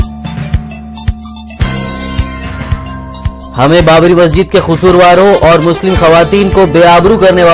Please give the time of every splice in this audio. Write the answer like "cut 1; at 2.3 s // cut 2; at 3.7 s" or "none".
cut 1; at 3.5 s